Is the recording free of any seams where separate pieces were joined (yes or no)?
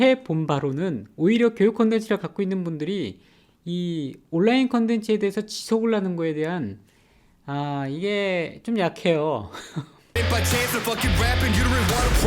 no